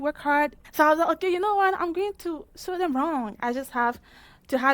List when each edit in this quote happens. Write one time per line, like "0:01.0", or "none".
0:03.3